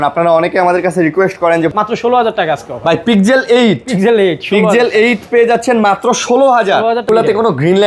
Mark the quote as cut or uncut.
cut